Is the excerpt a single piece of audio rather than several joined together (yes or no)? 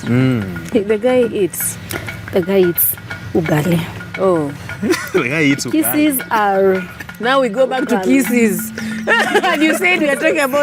yes